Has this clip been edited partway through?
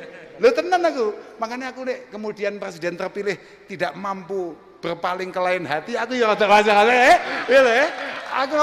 no; 0 cuts

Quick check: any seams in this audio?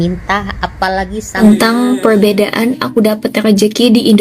yes; 1 cut; at 1.4 s

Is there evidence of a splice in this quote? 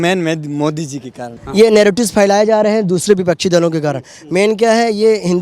yes; 1 cut; at 1.3 s

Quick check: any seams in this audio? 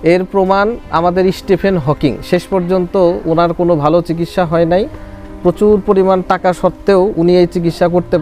no; 0 cuts

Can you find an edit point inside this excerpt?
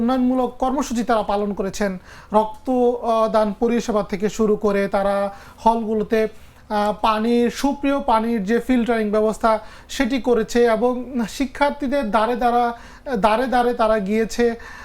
no; 0 cuts

